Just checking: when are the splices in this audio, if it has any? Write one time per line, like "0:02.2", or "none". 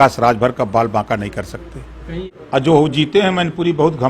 0:02.2